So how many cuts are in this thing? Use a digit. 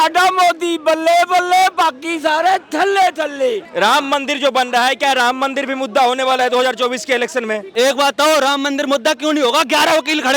2